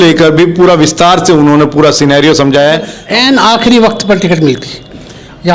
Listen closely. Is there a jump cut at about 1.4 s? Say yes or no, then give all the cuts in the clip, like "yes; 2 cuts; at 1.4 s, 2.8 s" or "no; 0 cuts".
no; 1 cut; at 3.0 s